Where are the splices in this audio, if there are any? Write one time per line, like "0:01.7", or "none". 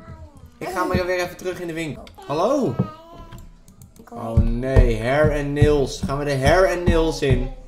none